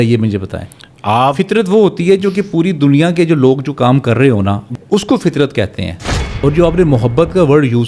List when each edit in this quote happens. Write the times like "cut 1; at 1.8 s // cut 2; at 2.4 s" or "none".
cut 1; at 6.3 s